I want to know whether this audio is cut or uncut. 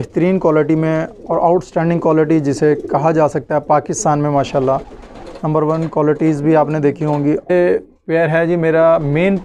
cut